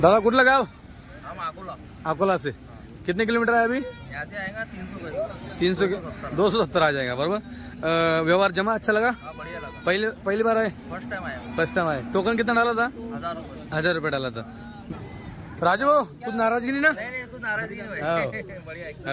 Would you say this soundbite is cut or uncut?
cut